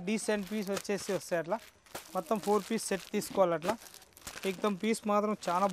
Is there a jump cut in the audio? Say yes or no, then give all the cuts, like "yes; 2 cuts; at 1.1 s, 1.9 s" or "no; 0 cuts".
no; 0 cuts